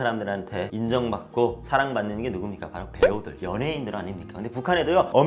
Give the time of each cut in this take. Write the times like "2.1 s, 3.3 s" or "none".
none